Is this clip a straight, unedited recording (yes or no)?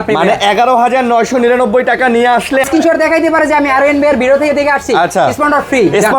no